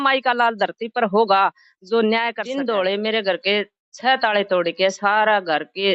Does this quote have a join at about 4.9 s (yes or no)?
no